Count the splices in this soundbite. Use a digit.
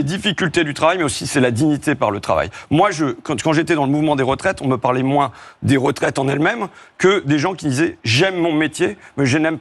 0